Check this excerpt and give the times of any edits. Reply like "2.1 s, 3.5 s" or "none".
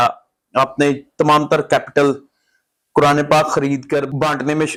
none